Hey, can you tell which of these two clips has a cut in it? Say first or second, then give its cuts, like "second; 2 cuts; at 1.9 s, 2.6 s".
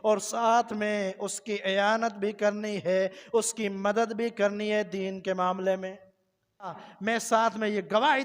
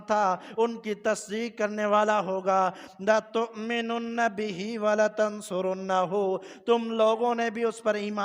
first; 1 cut; at 6.9 s